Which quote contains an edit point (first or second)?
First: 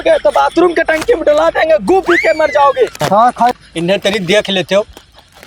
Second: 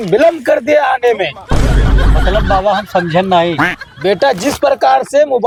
first